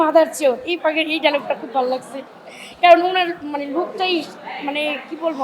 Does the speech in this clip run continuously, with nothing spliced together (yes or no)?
yes